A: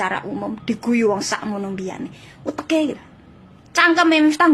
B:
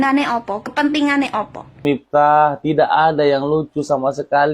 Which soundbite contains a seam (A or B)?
B